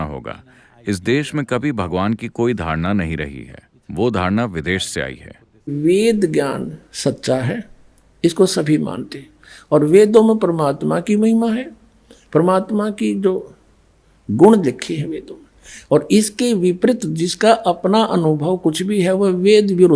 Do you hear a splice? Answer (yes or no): yes